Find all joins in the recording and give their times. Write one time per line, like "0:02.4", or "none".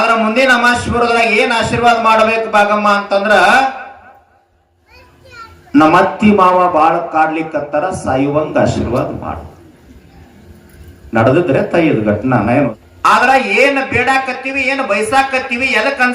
0:12.7

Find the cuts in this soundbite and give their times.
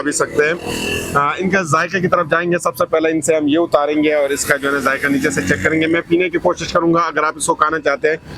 none

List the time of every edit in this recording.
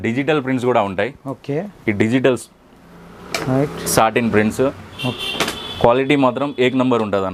none

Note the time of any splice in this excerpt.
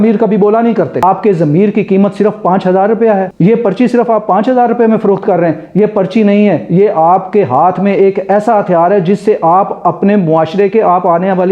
0:01.0
0:03.3

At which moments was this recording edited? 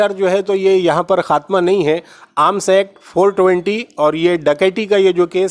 none

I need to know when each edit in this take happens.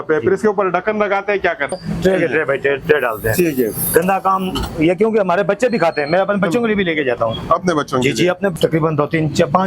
0:01.8
0:08.5

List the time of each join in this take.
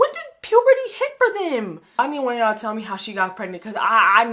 0:02.0

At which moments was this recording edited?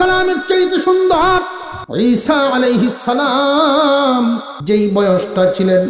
0:04.5

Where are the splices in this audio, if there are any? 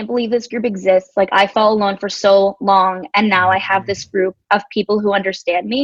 none

